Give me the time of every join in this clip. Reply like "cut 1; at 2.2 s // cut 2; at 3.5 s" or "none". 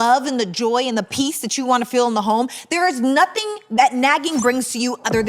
none